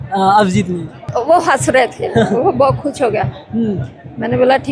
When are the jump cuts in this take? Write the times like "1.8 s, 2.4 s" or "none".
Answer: 1.1 s